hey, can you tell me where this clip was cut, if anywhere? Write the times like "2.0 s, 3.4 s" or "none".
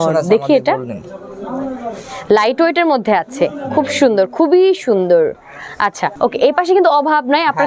none

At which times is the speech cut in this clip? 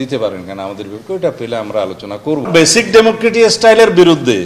2.5 s

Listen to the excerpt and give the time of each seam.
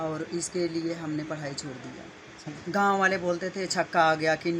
2.4 s

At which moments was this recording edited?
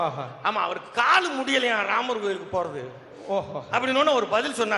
none

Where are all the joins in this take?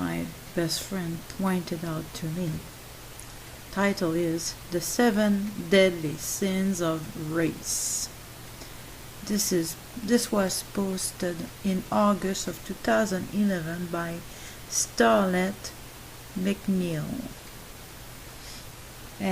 none

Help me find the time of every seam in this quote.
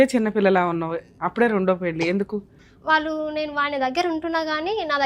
2.6 s

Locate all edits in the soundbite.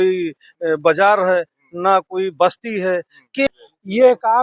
3.5 s

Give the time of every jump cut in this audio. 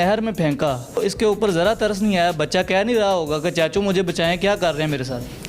1.0 s

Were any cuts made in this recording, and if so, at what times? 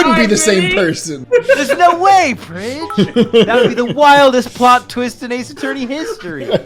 1.1 s

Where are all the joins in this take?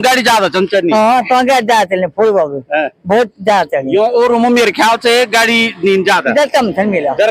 none

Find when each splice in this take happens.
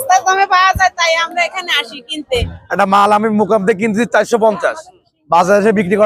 2.5 s

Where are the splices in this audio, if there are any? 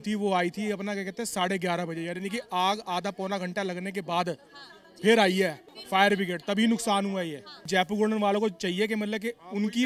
7.7 s

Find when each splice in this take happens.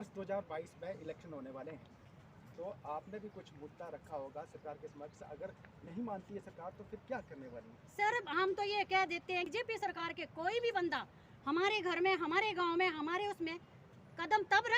9.5 s

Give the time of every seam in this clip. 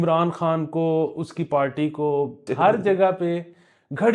2.5 s

